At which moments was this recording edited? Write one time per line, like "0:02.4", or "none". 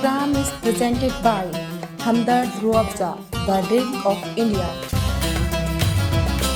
none